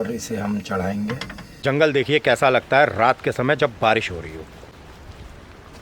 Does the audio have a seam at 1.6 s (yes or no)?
yes